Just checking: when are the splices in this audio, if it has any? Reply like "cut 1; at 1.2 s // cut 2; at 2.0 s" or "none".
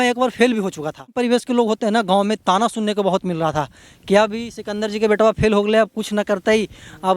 cut 1; at 1.1 s